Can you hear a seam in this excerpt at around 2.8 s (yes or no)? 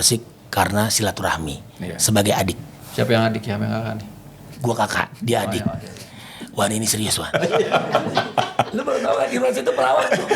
yes